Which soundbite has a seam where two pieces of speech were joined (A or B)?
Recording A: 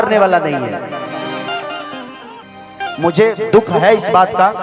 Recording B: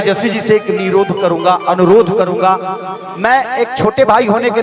A